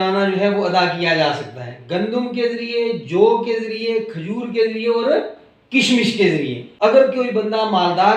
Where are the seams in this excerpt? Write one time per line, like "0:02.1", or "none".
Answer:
0:06.6

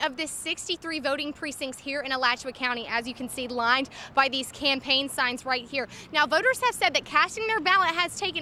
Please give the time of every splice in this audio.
none

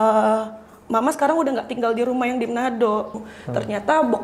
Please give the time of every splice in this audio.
0:03.3

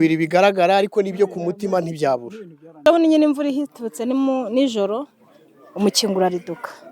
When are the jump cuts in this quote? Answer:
0:02.8

